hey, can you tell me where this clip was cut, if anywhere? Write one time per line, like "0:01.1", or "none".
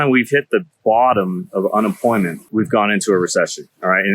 0:02.4